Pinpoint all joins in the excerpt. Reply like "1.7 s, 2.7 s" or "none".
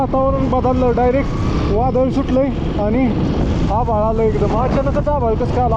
none